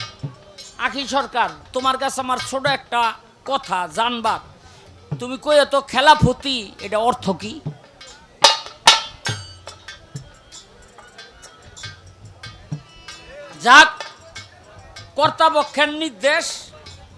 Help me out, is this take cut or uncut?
uncut